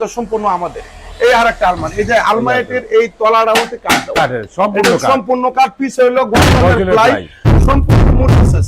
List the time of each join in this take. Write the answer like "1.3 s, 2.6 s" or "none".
none